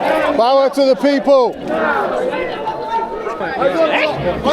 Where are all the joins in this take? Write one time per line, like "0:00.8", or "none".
0:03.4